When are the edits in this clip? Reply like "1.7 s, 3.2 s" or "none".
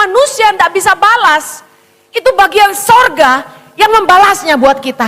none